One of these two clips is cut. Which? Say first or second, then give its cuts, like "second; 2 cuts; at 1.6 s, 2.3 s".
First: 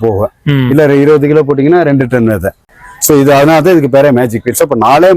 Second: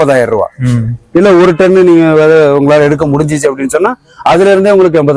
first; 1 cut; at 2.7 s